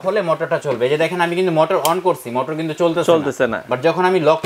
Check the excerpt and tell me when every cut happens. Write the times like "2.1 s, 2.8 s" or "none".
none